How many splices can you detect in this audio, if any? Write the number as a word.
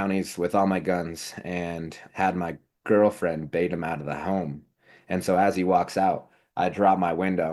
one